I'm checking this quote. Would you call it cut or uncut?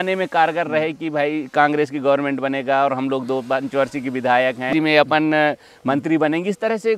cut